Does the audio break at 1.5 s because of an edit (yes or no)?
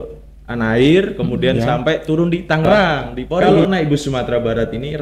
no